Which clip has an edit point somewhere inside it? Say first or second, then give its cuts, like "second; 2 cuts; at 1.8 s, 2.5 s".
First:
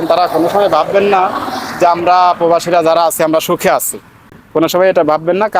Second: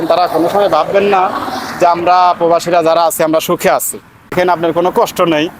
second; 1 cut; at 4.3 s